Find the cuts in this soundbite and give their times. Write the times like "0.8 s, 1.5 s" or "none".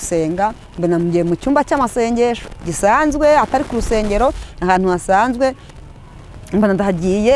none